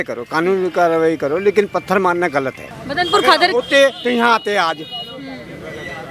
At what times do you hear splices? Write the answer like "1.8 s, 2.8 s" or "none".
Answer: 2.5 s